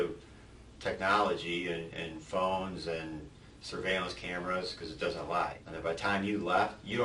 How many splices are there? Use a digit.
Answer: 1